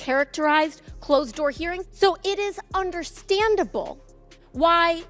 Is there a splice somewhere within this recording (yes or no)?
yes